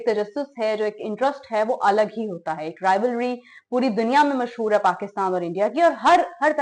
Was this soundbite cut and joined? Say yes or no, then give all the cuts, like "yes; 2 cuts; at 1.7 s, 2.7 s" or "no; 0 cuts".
no; 0 cuts